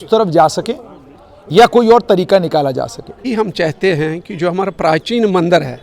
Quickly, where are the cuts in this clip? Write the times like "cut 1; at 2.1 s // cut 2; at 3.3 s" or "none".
cut 1; at 3.2 s